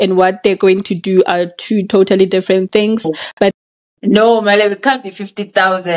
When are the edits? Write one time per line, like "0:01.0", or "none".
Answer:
0:03.5